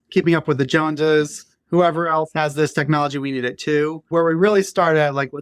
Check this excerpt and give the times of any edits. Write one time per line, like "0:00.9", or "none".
0:04.1